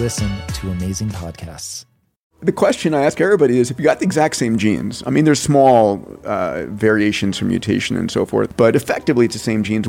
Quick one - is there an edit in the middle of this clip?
yes; 2 cuts; at 2.3 s, 8.5 s

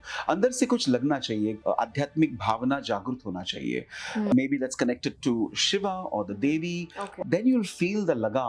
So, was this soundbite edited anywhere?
yes; 3 cuts; at 1.6 s, 4.3 s, 7.0 s

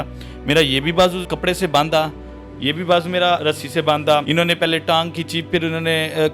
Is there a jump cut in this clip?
yes; 3 cuts; at 1.2 s, 3.4 s, 4.2 s

